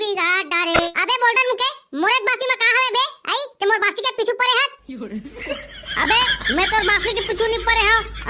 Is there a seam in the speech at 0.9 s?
yes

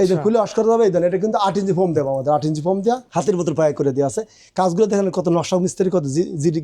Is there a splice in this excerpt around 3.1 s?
yes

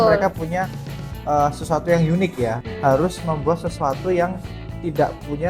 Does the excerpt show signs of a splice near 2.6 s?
yes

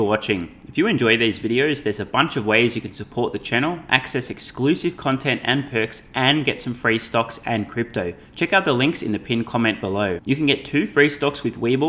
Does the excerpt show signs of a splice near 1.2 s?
no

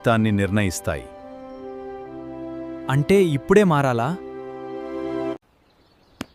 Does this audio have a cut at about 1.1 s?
no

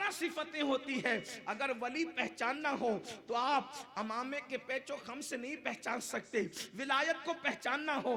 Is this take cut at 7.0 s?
yes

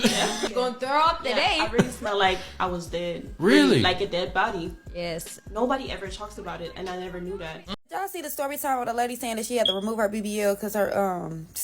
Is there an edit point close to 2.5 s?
no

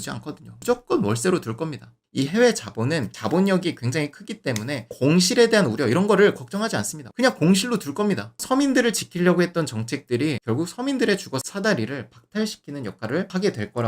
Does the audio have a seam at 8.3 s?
yes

